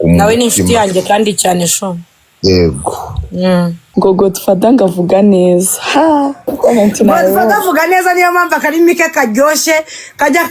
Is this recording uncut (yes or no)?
no